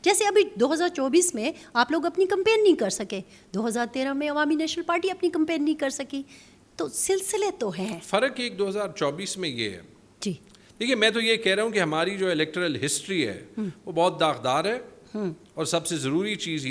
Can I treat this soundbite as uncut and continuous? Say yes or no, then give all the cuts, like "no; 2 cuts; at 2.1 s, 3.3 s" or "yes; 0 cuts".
yes; 0 cuts